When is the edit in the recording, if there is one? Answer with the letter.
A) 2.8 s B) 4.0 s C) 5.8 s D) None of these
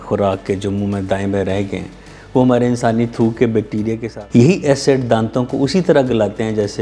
B